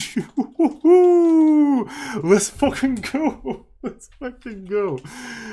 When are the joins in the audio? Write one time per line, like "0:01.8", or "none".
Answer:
none